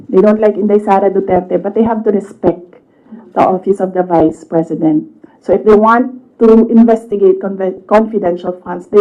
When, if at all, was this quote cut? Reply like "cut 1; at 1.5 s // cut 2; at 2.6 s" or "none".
none